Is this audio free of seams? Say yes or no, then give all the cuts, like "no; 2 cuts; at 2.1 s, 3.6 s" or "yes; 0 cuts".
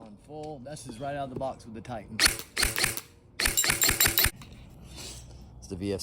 no; 1 cut; at 4.3 s